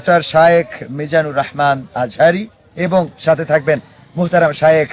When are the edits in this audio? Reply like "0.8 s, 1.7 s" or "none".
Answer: none